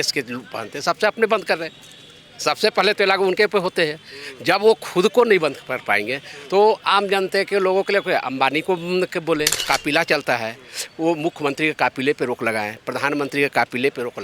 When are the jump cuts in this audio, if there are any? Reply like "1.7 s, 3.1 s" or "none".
9.6 s

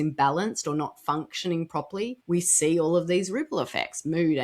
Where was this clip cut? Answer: 2.2 s

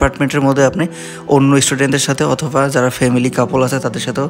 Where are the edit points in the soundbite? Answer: none

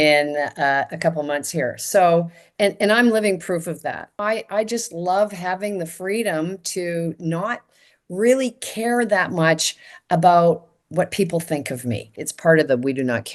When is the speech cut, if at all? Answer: 4.2 s, 12.3 s

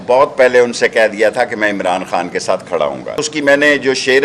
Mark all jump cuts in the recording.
3.2 s

